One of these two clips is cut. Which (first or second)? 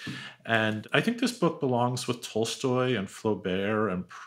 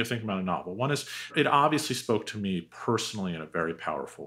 second